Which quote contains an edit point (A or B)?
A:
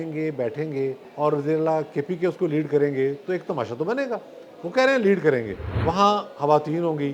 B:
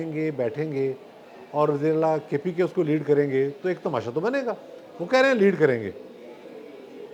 A